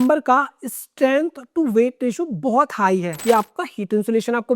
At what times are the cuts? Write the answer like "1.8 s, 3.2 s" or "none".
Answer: 3.1 s